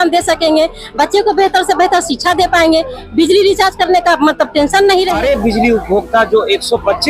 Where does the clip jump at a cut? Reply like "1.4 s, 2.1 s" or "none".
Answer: 5.2 s